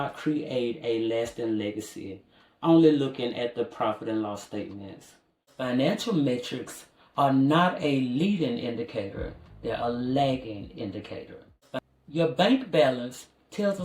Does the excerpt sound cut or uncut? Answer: cut